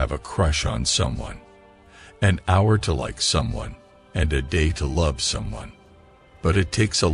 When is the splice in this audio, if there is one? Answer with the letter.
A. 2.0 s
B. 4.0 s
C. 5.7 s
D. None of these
D